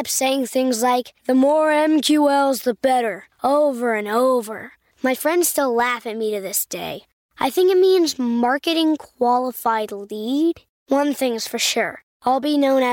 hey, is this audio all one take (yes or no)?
yes